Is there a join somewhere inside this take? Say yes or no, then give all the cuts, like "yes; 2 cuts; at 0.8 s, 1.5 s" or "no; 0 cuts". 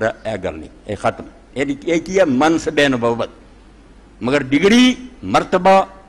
no; 0 cuts